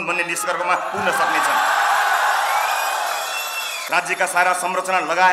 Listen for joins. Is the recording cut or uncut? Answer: cut